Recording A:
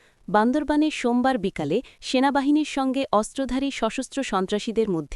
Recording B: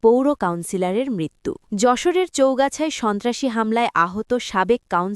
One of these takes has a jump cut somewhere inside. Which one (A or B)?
B